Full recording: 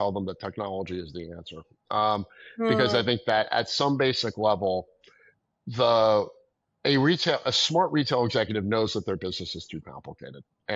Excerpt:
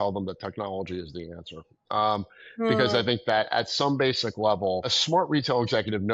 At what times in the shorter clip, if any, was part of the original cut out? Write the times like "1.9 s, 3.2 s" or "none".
4.9 s